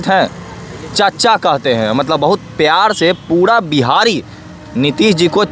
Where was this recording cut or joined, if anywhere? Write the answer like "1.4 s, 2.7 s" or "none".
none

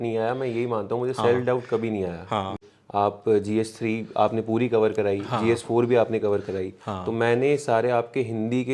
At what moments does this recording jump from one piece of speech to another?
2.6 s

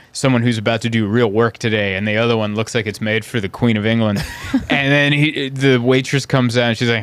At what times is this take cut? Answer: none

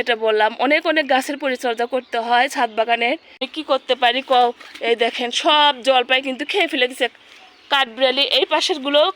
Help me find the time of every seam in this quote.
3.5 s

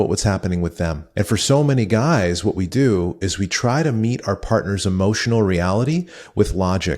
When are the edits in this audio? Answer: 1.0 s

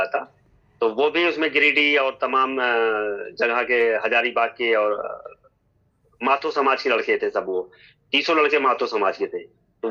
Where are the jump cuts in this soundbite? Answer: none

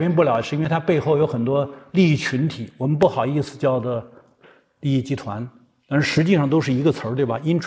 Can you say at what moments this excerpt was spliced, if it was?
none

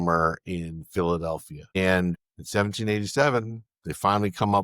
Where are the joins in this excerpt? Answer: 1.8 s, 2.3 s

